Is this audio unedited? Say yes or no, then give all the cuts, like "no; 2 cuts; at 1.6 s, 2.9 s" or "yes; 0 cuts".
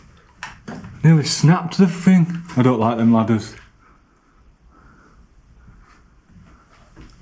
yes; 0 cuts